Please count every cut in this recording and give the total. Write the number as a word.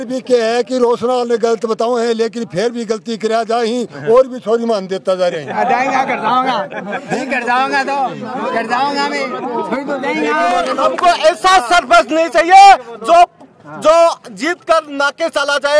one